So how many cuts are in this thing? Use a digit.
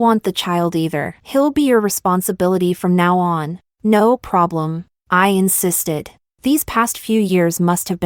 0